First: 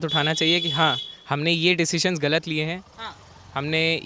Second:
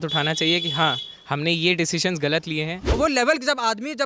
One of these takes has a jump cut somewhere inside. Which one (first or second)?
second